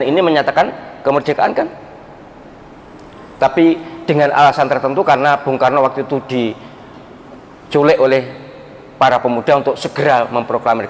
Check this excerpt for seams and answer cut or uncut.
uncut